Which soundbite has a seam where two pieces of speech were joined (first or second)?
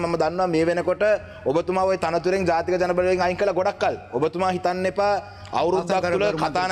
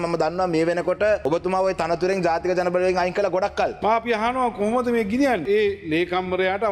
second